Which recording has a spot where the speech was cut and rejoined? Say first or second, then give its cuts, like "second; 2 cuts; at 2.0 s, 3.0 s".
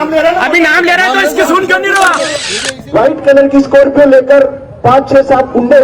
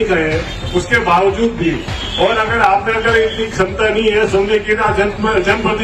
first; 1 cut; at 2.4 s